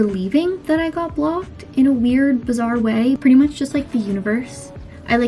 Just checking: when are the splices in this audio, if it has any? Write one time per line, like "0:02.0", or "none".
0:03.2